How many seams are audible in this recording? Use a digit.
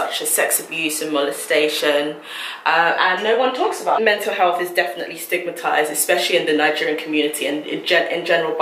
1